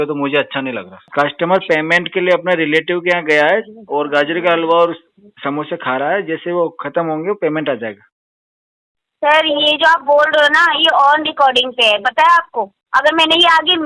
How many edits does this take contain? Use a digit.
1